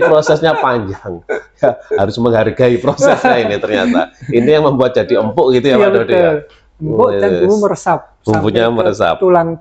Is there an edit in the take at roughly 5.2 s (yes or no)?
no